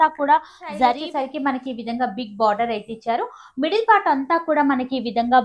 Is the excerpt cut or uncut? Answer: cut